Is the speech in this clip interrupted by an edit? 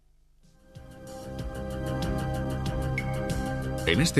no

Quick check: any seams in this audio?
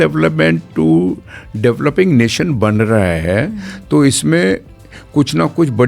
no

